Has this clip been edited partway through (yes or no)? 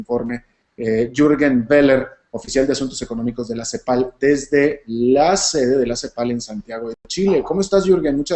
no